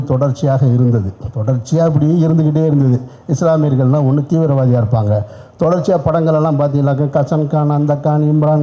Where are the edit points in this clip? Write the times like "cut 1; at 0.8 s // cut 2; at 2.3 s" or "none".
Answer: none